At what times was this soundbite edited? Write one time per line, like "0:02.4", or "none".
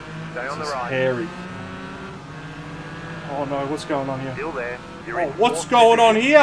0:04.9